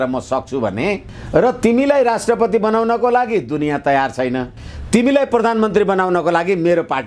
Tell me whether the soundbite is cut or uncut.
cut